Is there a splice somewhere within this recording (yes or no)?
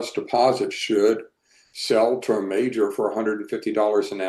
no